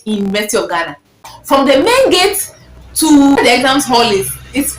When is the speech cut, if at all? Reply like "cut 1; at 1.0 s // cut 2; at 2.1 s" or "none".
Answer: cut 1; at 1.3 s // cut 2; at 3.4 s